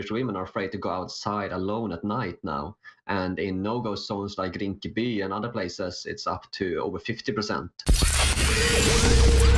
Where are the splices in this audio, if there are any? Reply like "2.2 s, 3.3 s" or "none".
7.7 s